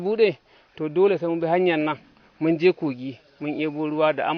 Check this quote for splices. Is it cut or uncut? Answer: uncut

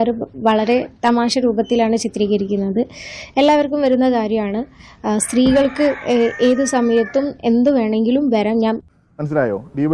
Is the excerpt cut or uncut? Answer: cut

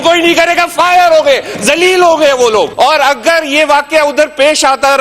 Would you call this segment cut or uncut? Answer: cut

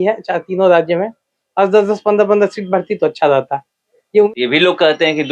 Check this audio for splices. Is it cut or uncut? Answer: cut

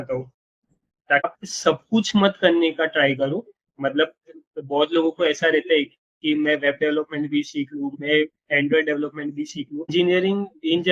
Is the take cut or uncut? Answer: cut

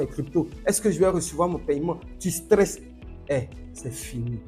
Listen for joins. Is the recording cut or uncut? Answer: uncut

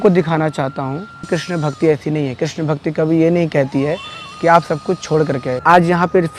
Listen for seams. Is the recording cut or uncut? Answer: cut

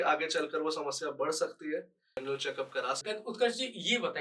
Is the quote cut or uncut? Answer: cut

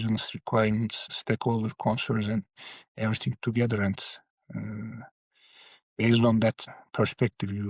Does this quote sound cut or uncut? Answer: cut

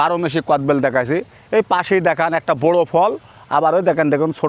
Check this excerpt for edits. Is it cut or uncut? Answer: uncut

